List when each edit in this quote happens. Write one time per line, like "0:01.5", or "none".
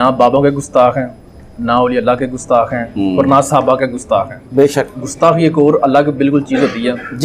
none